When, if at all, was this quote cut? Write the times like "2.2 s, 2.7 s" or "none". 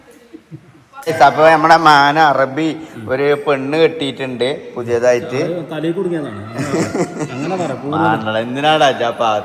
1.1 s